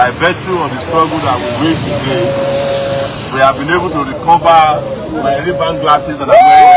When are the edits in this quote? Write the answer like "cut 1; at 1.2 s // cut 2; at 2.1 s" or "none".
none